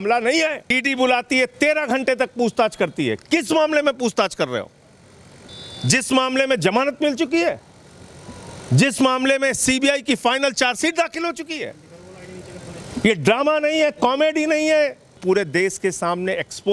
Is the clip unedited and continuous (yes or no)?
no